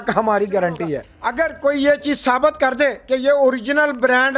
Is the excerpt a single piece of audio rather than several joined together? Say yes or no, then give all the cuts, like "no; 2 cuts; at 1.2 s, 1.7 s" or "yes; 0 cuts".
no; 1 cut; at 1.0 s